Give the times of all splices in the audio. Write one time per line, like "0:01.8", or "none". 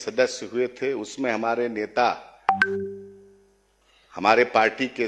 none